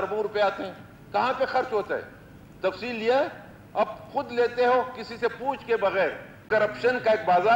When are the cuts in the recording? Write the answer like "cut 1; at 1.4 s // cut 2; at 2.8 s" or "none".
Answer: cut 1; at 6.4 s